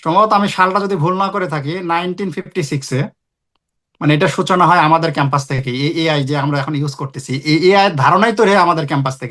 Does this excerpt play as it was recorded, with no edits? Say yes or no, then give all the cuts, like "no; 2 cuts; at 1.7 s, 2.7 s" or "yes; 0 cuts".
yes; 0 cuts